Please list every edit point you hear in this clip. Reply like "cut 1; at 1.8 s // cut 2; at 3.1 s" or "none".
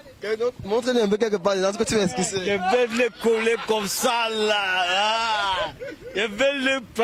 none